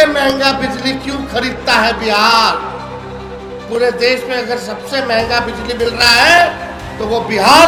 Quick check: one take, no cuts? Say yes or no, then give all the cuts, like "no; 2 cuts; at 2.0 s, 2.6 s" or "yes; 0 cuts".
yes; 0 cuts